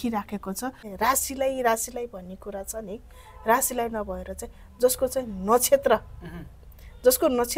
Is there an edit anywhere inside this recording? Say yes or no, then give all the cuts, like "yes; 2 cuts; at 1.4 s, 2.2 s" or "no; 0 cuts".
yes; 1 cut; at 0.9 s